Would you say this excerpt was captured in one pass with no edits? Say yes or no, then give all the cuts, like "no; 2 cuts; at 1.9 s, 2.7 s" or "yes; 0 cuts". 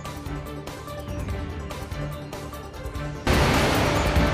no; 1 cut; at 3.2 s